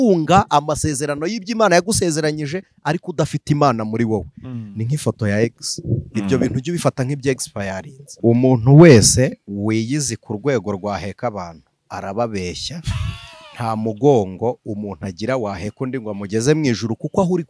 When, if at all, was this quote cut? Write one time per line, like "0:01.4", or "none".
none